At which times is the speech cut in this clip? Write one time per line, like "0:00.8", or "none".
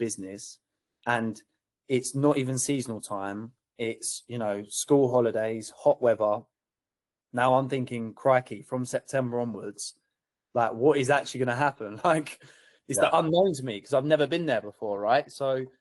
none